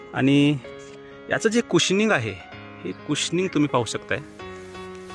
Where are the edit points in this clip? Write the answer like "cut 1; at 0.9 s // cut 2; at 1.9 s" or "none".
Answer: none